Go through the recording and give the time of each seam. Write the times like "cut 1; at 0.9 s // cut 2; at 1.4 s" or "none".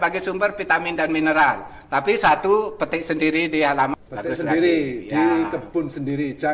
cut 1; at 3.9 s